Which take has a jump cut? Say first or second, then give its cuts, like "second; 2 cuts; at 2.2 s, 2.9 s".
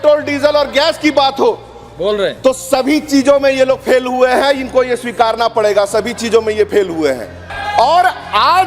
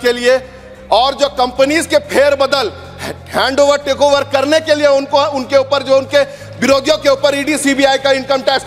first; 1 cut; at 7.5 s